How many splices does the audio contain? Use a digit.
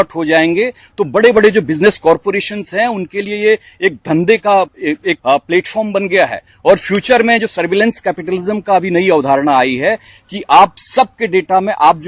1